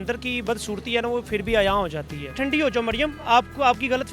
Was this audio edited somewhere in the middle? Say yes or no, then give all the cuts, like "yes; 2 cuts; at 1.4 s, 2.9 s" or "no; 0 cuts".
yes; 1 cut; at 2.3 s